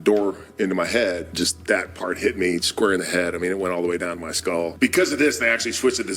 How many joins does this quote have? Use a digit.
2